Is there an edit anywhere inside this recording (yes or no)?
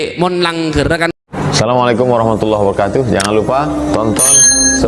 yes